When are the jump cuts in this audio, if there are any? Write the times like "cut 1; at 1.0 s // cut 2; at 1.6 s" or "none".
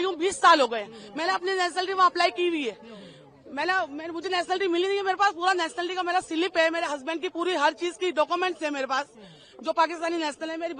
none